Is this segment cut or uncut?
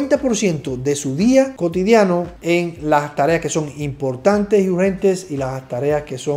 uncut